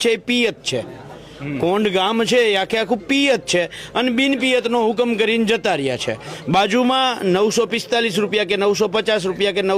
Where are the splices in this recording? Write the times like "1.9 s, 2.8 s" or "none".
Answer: none